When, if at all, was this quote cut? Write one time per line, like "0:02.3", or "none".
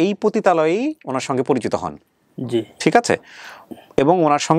none